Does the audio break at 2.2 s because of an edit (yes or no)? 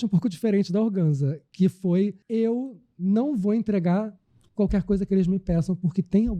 yes